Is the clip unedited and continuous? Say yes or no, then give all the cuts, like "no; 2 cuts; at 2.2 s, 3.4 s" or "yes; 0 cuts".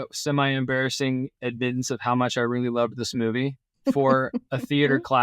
no; 2 cuts; at 1.3 s, 3.9 s